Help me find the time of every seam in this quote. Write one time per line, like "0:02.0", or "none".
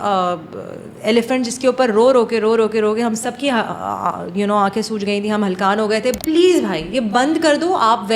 0:06.2